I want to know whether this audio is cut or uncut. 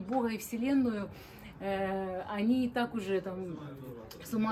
uncut